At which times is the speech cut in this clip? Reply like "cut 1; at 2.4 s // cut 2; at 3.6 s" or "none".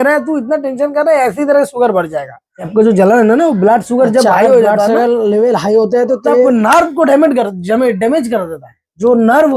cut 1; at 2.7 s